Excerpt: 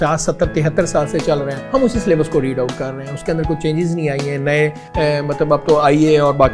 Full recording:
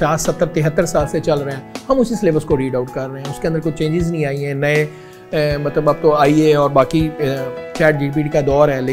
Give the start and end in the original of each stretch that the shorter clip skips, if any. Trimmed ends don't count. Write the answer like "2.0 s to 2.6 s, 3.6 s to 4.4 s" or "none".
1.6 s to 1.7 s, 5.0 s to 5.2 s